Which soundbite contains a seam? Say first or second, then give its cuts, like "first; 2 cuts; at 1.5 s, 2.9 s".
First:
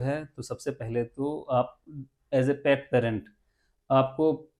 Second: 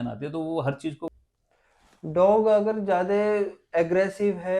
second; 1 cut; at 1.1 s